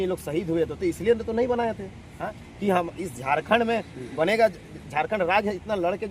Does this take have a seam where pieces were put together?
no; 0 cuts

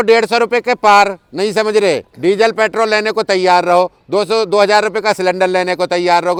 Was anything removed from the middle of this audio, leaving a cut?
no; 0 cuts

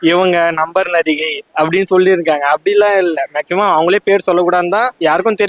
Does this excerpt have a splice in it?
no; 0 cuts

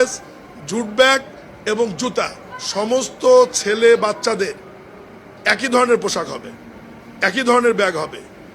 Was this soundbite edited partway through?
yes; 1 cut; at 2.4 s

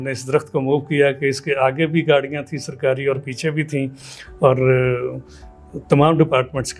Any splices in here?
no; 0 cuts

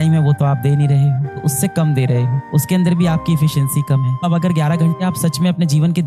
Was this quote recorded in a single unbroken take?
no; 2 cuts; at 1.4 s, 4.2 s

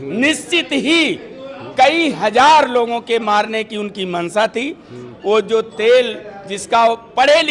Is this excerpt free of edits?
yes; 0 cuts

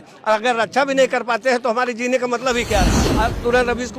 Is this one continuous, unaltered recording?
no; 1 cut; at 3.0 s

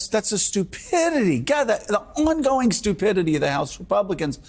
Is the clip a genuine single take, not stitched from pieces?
yes; 0 cuts

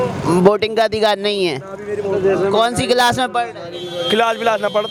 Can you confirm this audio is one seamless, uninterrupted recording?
yes; 0 cuts

